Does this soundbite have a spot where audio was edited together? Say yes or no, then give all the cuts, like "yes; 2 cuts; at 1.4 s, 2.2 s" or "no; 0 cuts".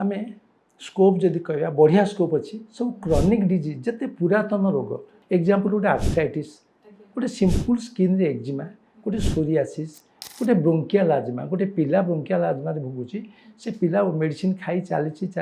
yes; 2 cuts; at 5.1 s, 10.2 s